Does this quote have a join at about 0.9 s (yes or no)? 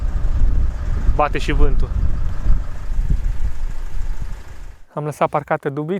no